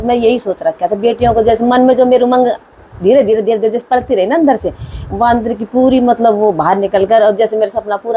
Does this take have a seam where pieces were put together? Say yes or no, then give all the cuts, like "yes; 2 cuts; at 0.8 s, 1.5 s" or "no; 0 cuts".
no; 0 cuts